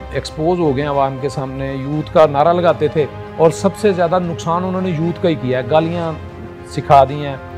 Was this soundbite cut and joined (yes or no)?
no